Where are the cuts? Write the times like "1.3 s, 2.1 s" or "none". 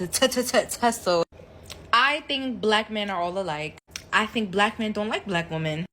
1.3 s